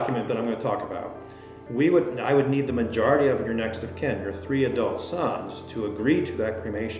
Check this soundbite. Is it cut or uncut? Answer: uncut